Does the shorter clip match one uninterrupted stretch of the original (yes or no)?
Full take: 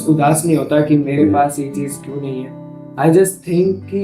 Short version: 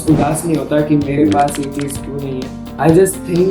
no